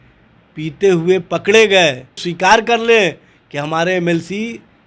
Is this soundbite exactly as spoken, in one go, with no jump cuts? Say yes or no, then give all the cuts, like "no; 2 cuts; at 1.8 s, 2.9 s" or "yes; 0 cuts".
no; 1 cut; at 2.2 s